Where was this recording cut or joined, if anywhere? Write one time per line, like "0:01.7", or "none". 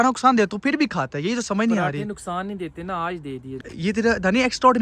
0:03.7

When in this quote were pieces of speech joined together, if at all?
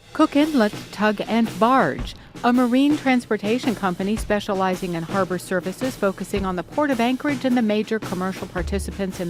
none

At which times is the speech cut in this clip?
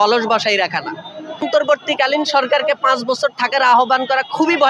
0:01.4

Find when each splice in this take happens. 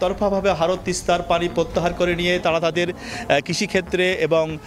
none

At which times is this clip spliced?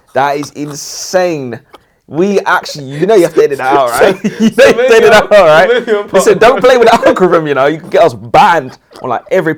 none

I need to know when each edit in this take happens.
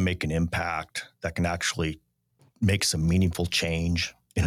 none

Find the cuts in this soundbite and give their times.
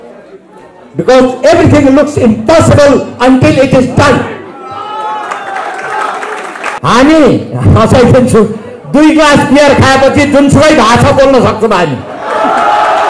0:06.7

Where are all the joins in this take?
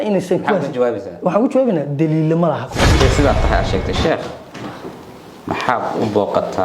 0:02.9

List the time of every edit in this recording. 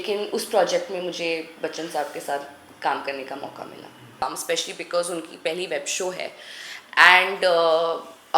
0:04.2

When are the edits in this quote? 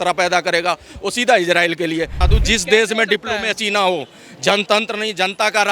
0:02.2

